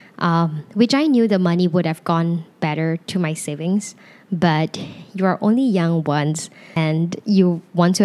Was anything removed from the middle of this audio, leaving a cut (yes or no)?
yes